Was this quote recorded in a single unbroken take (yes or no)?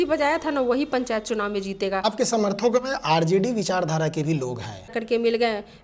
no